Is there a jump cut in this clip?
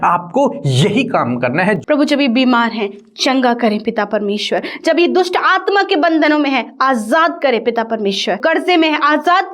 yes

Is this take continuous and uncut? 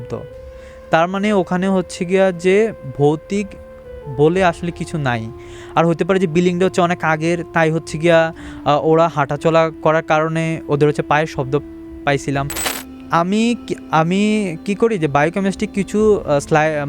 no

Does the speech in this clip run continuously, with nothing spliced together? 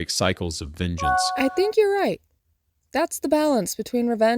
no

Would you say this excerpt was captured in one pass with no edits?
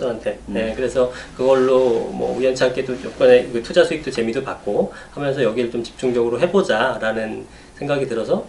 no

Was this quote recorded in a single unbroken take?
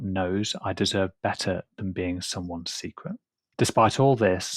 no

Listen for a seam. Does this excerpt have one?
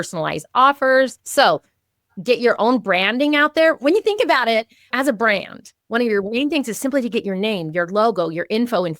yes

